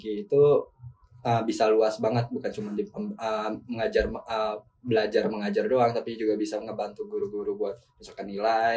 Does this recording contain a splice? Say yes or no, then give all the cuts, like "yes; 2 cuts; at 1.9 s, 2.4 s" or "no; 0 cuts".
no; 0 cuts